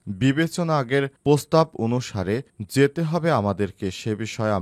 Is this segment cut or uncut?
uncut